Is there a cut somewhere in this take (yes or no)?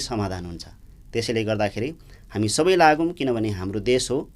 no